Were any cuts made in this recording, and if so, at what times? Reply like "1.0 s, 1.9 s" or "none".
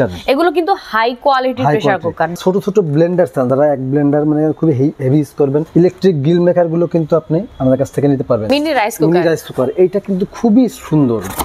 2.3 s, 3.5 s, 5.7 s, 7.5 s, 8.4 s